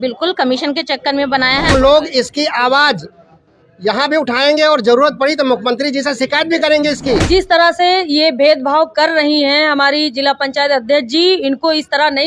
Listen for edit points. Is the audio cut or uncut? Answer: cut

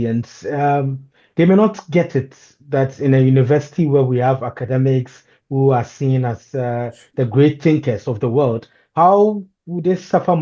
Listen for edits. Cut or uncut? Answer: uncut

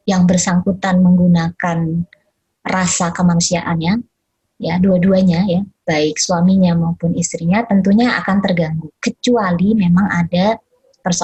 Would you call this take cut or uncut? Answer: uncut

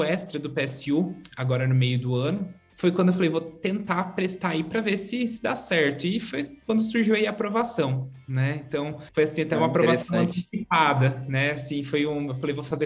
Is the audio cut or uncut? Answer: cut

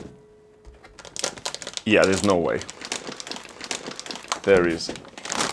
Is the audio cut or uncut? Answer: cut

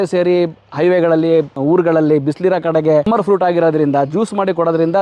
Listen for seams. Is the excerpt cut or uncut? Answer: cut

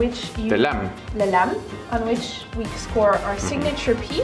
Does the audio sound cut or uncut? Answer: uncut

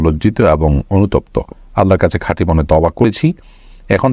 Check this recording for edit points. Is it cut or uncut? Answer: cut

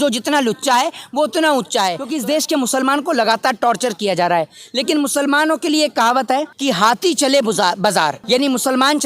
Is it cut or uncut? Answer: cut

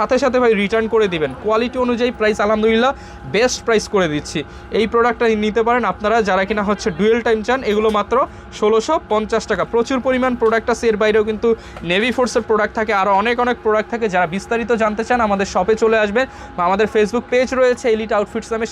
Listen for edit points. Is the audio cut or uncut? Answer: uncut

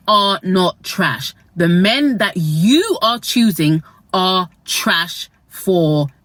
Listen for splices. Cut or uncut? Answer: uncut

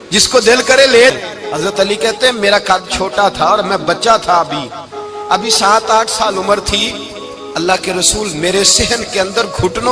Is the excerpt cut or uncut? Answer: cut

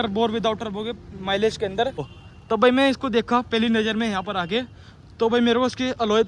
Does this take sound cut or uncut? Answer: cut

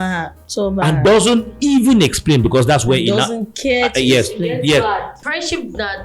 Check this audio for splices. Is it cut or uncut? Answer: cut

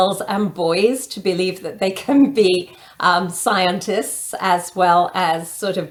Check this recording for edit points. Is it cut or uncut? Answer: uncut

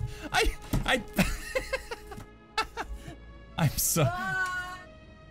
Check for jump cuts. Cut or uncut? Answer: uncut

